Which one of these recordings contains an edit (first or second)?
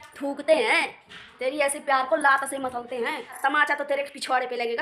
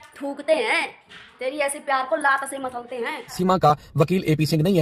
second